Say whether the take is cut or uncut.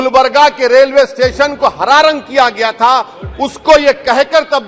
uncut